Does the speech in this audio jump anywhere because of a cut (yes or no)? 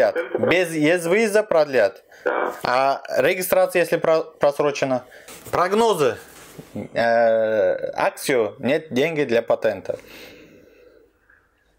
yes